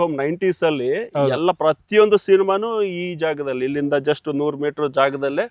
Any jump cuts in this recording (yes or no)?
no